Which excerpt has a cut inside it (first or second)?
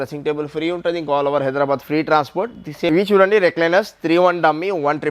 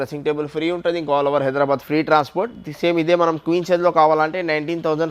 first